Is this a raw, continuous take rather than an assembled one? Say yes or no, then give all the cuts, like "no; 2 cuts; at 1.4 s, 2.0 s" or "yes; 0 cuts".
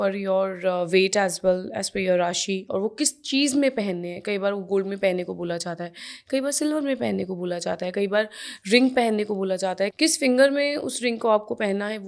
yes; 0 cuts